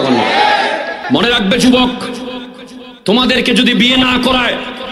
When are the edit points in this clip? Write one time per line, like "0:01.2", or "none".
0:01.0

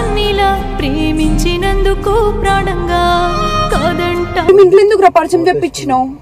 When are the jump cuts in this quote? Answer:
0:04.5

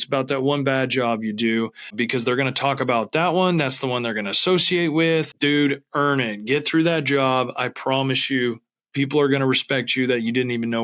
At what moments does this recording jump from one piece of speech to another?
0:01.9
0:05.3

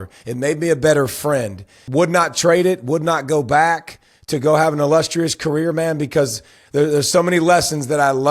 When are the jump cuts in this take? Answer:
0:01.8

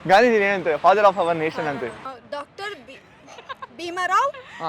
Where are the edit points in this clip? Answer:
0:02.0

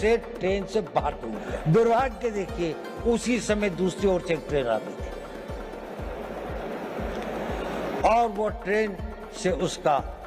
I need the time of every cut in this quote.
0:01.5

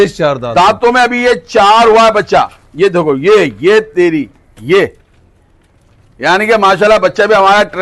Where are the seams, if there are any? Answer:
none

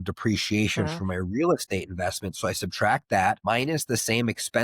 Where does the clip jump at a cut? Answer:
0:03.4

